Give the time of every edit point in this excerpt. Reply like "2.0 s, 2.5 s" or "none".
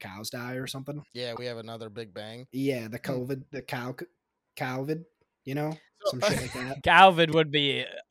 1.1 s, 2.4 s, 6.9 s